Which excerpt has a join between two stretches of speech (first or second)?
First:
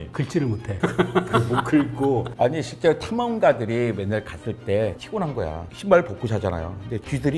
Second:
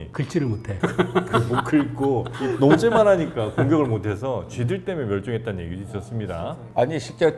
first